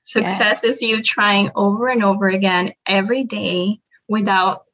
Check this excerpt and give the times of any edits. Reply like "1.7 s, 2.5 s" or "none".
none